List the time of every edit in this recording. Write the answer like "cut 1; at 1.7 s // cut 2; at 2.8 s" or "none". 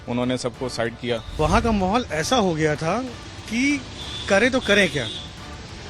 cut 1; at 1.3 s